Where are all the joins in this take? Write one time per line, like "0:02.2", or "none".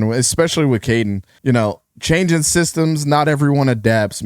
0:01.3